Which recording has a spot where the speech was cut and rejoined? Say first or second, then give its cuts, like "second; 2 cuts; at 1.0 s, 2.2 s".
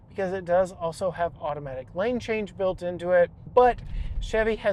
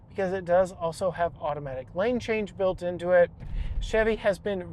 second; 1 cut; at 3.4 s